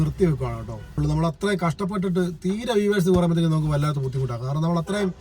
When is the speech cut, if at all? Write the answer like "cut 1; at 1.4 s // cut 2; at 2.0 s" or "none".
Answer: cut 1; at 1.0 s